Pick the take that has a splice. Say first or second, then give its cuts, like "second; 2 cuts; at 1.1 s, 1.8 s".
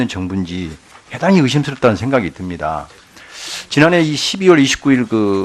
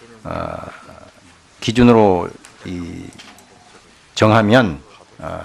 first; 1 cut; at 4.1 s